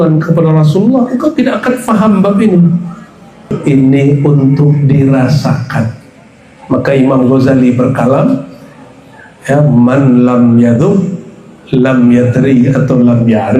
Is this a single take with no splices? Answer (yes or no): no